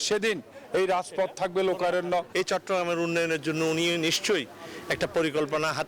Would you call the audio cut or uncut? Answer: cut